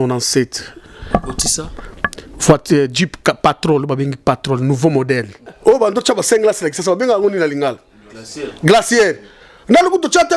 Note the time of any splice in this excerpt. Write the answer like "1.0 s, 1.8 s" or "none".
5.5 s